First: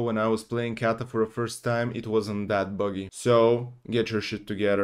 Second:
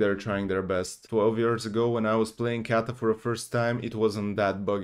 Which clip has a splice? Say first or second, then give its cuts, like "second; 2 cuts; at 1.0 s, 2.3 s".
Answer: second; 1 cut; at 1.0 s